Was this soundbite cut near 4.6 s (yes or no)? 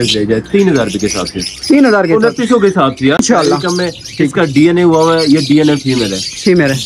no